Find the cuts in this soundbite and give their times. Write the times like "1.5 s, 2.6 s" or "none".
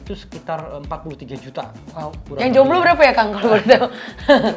none